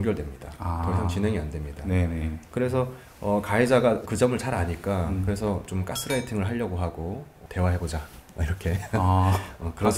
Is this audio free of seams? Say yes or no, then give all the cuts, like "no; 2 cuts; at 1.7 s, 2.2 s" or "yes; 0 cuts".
yes; 0 cuts